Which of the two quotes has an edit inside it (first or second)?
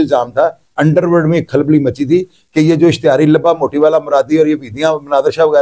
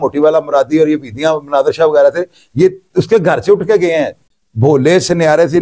second